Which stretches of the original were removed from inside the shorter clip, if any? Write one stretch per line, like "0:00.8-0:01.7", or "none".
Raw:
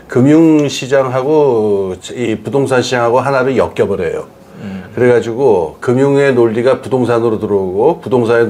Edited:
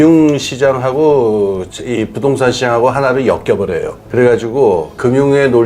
0:04.3-0:04.8